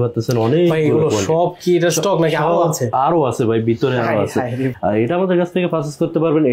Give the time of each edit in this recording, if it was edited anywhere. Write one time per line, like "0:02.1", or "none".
0:04.7

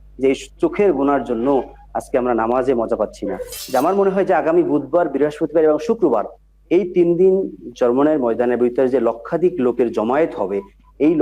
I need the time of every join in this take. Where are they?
0:03.5

